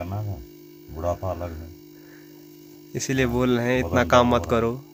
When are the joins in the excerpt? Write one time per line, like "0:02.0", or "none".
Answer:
none